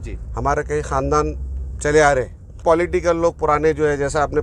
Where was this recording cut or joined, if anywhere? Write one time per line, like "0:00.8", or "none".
0:02.6